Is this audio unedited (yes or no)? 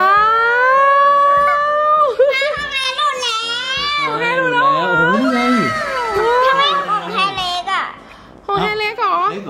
yes